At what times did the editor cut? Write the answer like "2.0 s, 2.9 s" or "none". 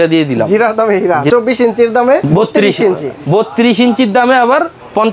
1.3 s, 2.2 s